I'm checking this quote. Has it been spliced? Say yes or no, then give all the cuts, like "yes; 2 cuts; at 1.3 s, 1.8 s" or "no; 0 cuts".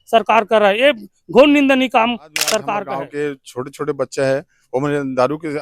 yes; 1 cut; at 2.9 s